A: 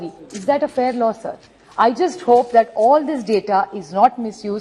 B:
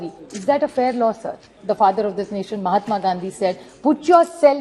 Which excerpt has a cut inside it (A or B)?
B